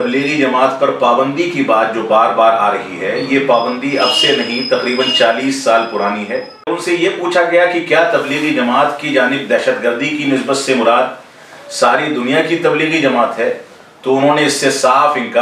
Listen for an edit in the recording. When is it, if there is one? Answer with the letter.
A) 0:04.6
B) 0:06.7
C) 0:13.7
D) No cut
B